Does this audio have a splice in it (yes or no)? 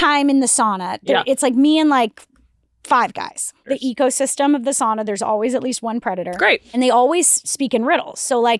yes